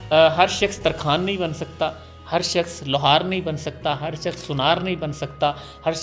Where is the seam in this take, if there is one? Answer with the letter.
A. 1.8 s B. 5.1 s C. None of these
C